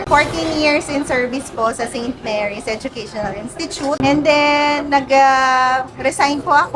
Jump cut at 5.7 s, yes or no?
no